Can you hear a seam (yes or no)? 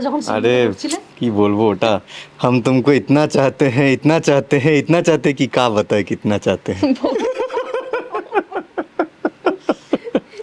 no